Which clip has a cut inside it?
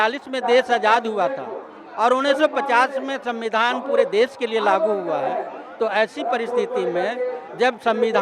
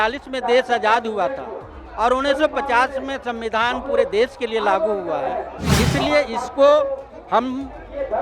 second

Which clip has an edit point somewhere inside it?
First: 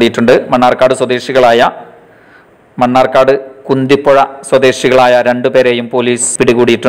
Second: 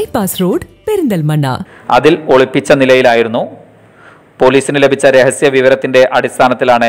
second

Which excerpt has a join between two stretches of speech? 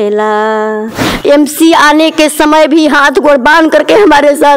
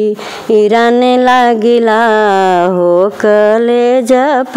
first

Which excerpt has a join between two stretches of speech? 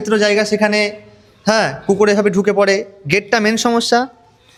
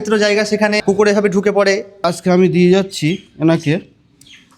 second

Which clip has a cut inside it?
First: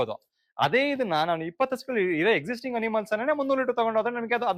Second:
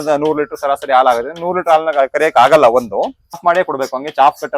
second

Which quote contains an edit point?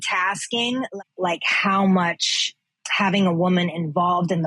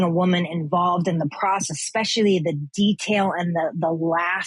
first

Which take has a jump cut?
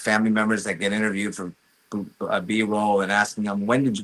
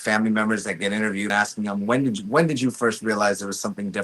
second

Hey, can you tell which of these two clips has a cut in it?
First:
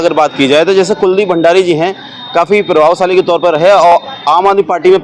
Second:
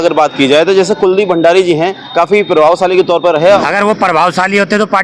second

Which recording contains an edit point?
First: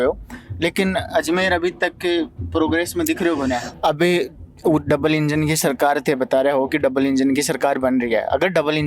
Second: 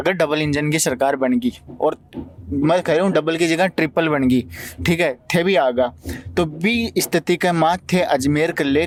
first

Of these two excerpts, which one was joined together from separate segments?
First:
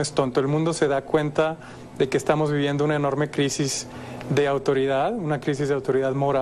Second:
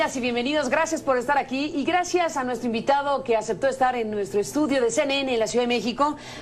first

